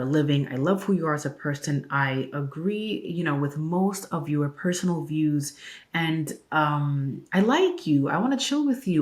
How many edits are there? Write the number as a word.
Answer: zero